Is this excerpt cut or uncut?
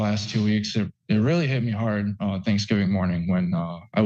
uncut